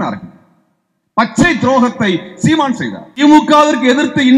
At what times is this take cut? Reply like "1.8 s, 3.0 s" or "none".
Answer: 3.2 s